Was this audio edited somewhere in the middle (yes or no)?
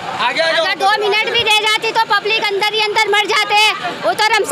no